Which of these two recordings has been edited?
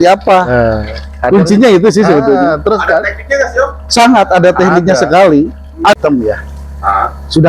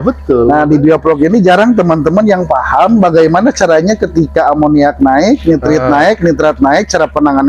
first; 1 cut; at 6.0 s

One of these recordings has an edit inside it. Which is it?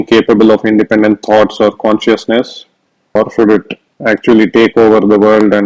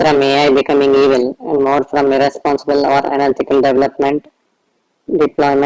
first; 1 cut; at 3.2 s

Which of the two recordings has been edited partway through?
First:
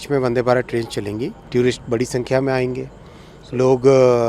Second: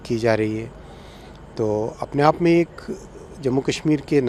first; 1 cut; at 1.4 s

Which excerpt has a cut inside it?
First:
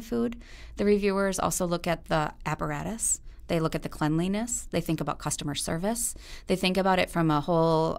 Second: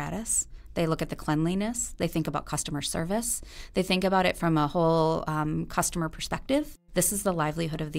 second; 1 cut; at 6.8 s

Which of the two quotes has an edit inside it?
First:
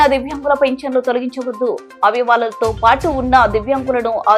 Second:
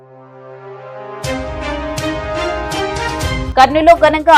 second; 1 cut; at 2.9 s

